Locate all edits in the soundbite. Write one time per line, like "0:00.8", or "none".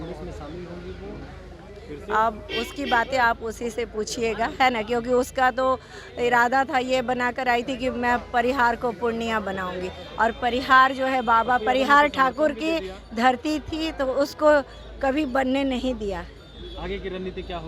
none